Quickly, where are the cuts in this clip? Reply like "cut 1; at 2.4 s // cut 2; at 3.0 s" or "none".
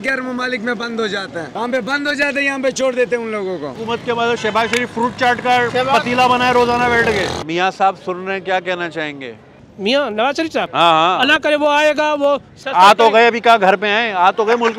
cut 1; at 1.5 s // cut 2; at 3.8 s // cut 3; at 7.4 s